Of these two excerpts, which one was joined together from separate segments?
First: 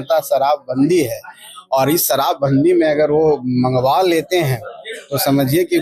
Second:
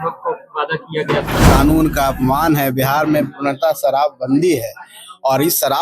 second; 1 cut; at 1.4 s

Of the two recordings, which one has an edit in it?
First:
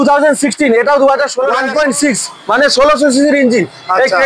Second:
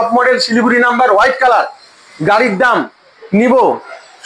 first; 1 cut; at 1.6 s

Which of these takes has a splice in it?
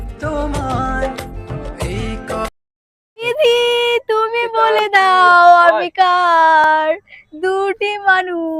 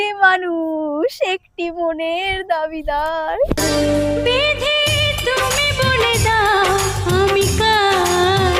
first; 1 cut; at 3.3 s

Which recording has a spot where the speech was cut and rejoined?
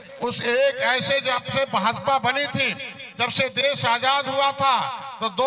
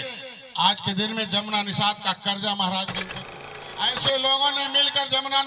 second; 1 cut; at 3.3 s

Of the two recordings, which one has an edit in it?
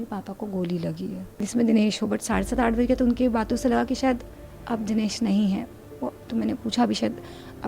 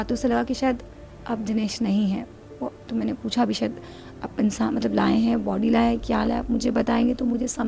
first; 1 cut; at 1.5 s

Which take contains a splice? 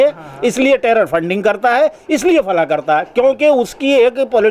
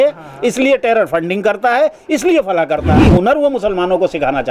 second; 1 cut; at 3.0 s

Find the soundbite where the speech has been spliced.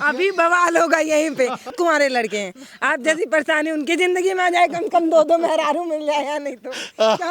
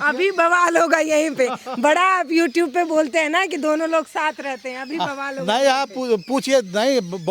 first; 1 cut; at 1.7 s

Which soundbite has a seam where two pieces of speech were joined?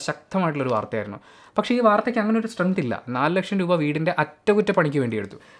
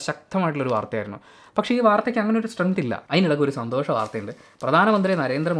second; 1 cut; at 3.0 s

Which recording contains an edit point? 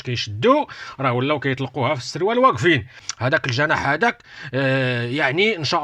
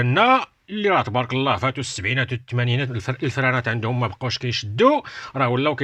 first; 1 cut; at 3.1 s

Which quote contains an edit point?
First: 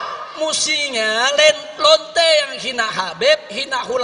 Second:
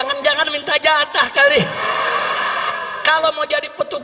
second; 1 cut; at 2.7 s

